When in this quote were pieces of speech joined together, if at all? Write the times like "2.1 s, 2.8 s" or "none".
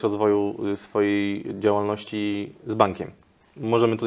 none